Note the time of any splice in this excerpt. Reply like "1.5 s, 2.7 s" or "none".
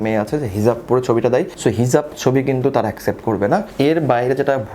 3.7 s

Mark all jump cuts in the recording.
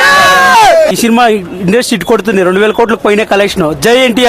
1.0 s

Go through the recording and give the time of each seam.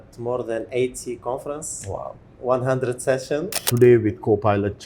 3.6 s

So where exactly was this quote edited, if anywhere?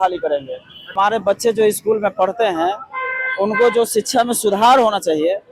0.9 s

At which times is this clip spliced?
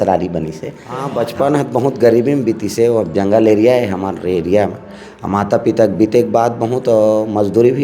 1.2 s

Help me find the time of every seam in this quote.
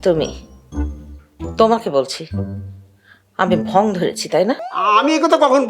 4.7 s

